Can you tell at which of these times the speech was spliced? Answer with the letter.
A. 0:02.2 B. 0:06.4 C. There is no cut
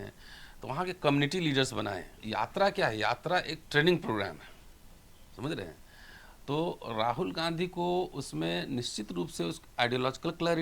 A